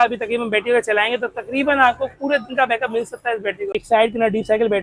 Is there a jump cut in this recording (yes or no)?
yes